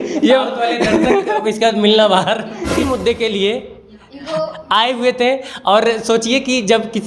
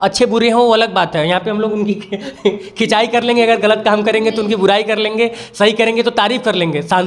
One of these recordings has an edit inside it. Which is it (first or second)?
first